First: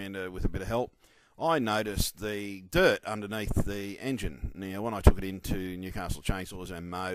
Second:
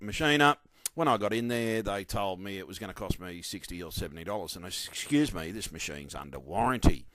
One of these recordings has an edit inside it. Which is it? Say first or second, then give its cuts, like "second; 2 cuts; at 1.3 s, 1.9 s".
second; 1 cut; at 2.9 s